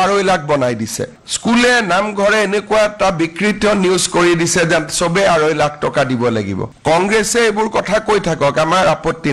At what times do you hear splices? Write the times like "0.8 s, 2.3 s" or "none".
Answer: 1.2 s, 6.7 s